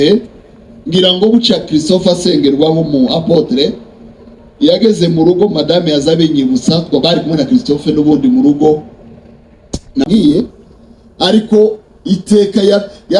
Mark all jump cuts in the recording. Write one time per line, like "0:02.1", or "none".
0:10.0